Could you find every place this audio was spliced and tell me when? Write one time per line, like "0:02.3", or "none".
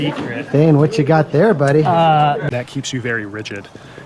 0:02.4